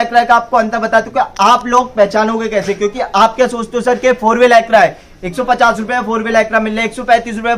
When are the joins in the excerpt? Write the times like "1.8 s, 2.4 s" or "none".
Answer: none